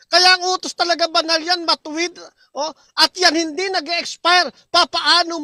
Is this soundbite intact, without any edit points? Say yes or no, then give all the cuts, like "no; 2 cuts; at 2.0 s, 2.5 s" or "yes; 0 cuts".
yes; 0 cuts